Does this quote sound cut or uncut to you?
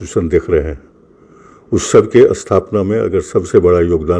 uncut